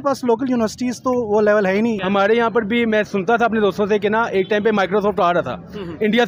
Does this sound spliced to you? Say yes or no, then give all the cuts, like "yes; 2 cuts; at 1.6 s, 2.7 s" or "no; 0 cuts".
yes; 1 cut; at 2.0 s